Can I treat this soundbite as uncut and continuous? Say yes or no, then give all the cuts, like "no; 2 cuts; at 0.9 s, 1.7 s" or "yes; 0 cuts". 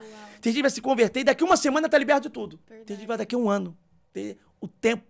yes; 0 cuts